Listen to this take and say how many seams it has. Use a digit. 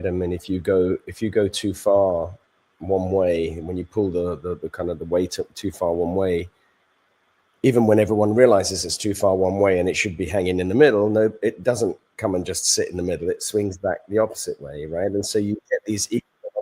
0